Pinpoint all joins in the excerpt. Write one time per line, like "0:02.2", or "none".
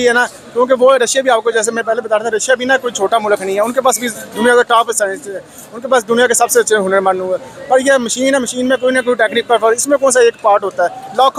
none